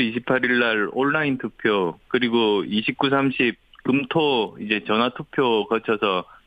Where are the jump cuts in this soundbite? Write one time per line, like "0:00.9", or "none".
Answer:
0:03.2

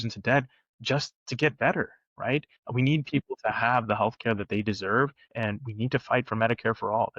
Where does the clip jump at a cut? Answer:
0:02.6
0:05.2

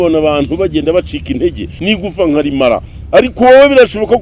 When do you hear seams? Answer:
0:01.7

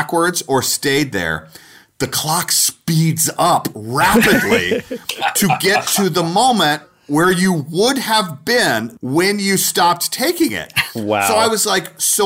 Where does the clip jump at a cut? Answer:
0:06.9
0:08.9

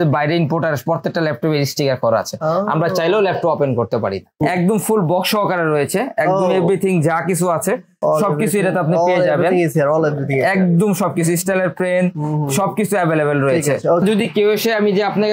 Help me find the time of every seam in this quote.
0:04.4
0:14.0

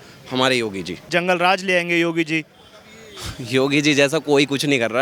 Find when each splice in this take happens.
0:01.1

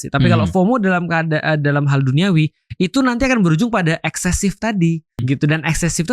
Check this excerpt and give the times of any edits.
0:05.2

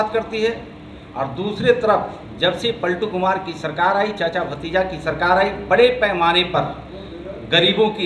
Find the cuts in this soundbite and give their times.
none

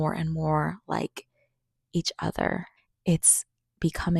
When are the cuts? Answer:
0:02.7

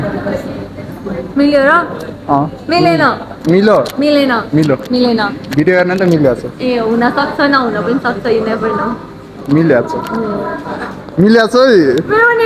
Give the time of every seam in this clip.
none

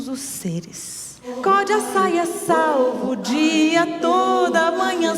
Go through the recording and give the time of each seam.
0:01.3

